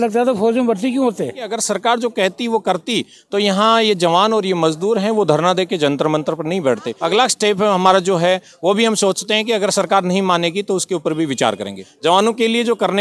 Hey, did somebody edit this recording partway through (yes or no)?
yes